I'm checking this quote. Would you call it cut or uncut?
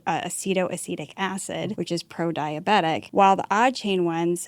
cut